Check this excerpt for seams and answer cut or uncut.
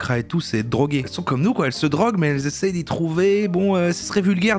cut